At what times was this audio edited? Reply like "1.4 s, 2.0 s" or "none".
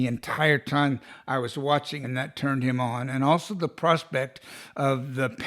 1.9 s